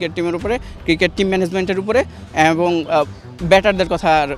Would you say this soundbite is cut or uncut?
uncut